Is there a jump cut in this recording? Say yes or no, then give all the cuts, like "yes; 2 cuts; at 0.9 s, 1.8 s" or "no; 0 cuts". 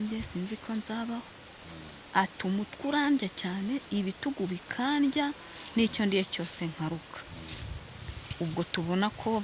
no; 0 cuts